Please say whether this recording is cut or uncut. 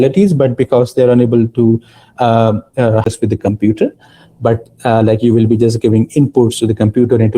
cut